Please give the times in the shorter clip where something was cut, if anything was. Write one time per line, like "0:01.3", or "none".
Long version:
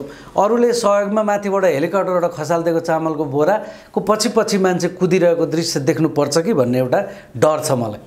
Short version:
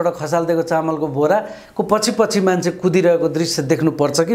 none